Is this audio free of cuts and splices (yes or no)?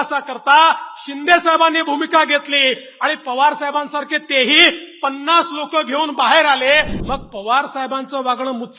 no